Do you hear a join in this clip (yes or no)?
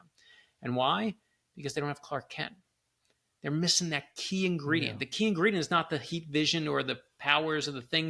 no